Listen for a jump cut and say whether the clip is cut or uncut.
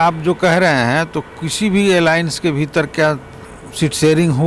uncut